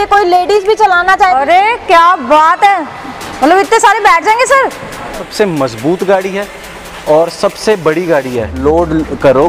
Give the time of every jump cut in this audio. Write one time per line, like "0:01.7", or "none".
0:01.4
0:05.2
0:08.6

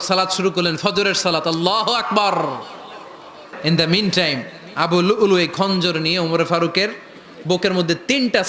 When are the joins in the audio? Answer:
0:03.6

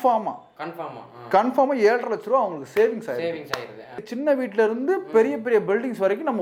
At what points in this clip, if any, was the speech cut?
0:03.6

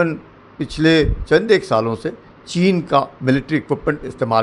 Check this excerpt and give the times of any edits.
0:03.1

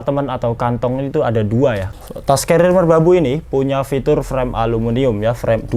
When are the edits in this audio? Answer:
0:01.9

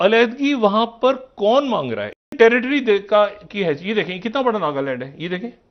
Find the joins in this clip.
0:02.3

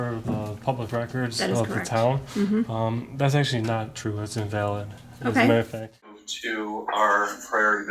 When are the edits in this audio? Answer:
0:06.3

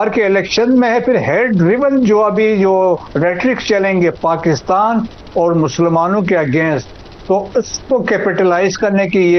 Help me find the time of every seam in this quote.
none

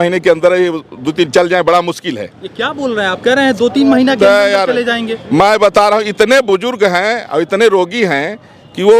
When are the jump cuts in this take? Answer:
none

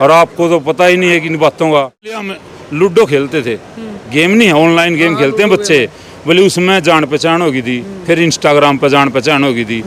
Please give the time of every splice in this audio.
0:02.3

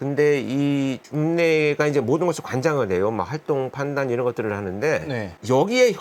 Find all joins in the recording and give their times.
none

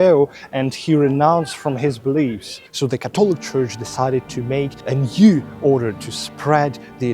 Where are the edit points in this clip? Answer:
0:02.5
0:04.8

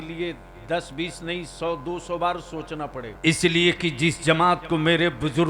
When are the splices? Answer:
0:03.1

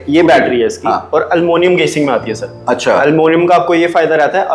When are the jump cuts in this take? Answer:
none

